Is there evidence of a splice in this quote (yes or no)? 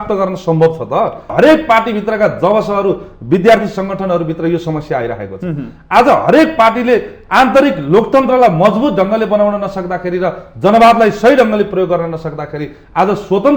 yes